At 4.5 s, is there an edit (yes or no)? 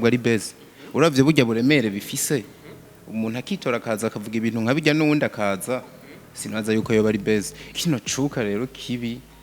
no